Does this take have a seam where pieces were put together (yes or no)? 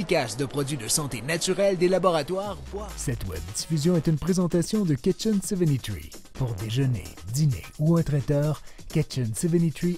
yes